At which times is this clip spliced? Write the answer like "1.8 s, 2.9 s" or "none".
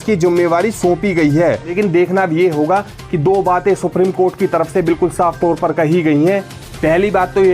1.7 s